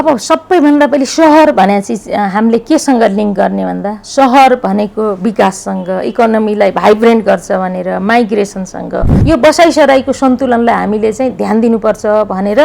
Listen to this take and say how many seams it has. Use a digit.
1